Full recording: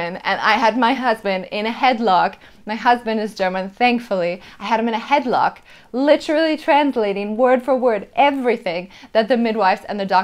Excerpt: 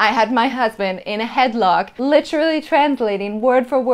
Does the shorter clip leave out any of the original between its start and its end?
yes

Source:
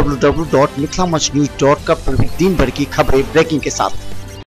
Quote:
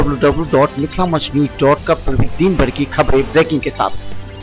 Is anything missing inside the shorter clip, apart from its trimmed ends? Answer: no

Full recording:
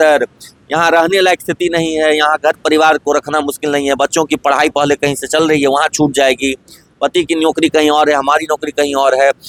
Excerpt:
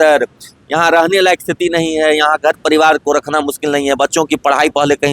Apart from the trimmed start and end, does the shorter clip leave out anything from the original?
no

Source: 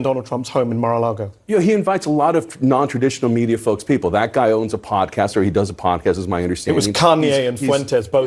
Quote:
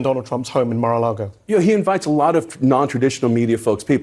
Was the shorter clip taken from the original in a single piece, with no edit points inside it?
yes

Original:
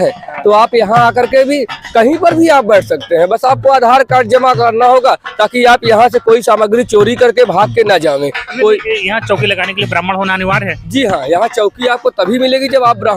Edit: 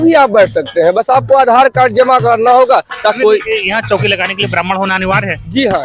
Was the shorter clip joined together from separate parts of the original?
yes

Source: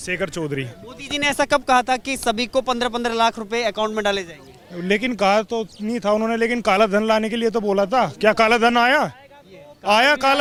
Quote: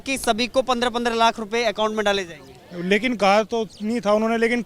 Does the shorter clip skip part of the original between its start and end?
no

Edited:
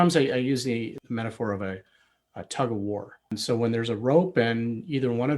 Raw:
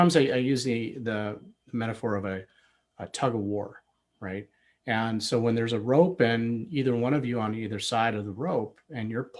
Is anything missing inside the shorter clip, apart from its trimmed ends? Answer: yes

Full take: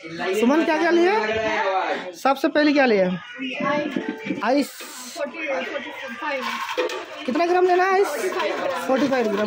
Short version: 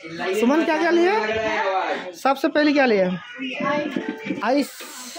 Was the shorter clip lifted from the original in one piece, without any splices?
yes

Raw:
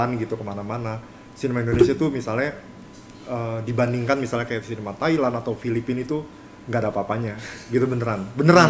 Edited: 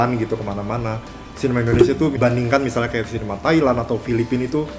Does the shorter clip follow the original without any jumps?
no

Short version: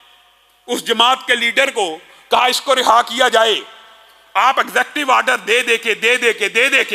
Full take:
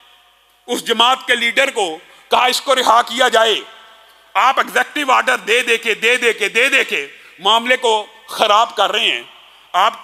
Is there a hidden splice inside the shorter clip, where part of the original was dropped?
no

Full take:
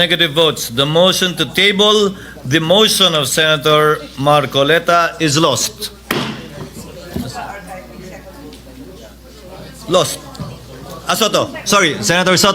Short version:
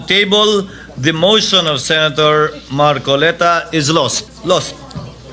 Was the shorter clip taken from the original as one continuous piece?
no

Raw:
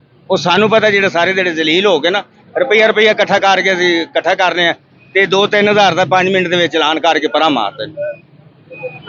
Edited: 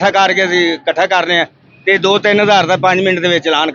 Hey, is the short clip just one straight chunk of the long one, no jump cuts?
yes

